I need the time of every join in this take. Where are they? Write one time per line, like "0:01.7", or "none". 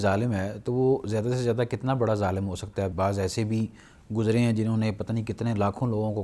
0:02.9